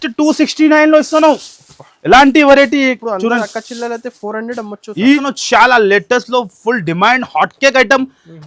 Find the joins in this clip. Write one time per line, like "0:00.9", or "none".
0:05.2

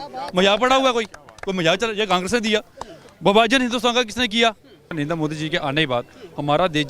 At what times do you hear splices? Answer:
0:04.9

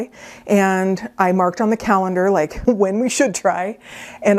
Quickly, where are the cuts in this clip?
none

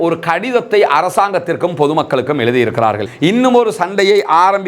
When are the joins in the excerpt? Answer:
0:03.1

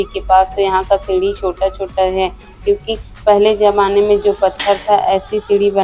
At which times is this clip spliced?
none

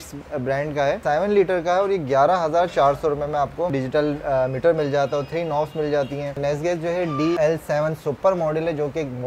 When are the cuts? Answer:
0:01.0
0:03.7
0:06.4
0:07.4

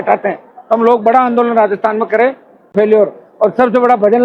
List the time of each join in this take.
0:02.7

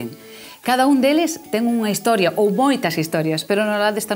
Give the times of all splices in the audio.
0:01.0

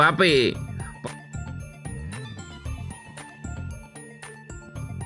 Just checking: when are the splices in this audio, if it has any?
0:01.0

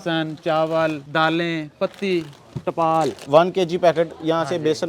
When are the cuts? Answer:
0:01.0
0:03.2

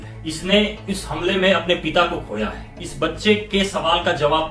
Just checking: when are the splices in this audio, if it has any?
none

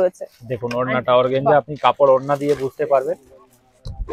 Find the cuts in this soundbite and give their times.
none

